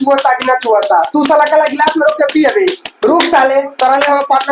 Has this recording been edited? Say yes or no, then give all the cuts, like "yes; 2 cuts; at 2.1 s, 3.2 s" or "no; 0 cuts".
no; 0 cuts